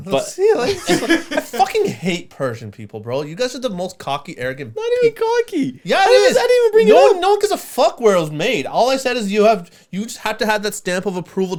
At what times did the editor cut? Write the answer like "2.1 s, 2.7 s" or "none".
none